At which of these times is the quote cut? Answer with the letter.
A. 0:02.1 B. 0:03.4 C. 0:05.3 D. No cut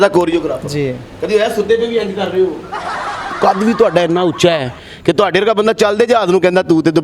B